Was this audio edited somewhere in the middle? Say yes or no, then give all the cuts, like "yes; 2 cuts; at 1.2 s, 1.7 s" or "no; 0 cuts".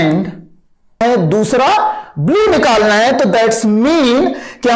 yes; 1 cut; at 1.0 s